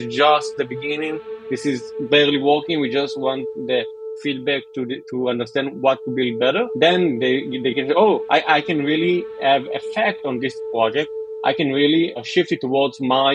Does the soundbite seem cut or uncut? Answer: cut